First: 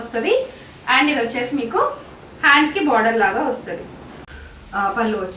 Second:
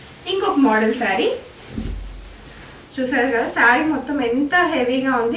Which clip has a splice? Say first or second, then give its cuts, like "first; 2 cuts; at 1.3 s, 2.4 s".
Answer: first; 1 cut; at 4.2 s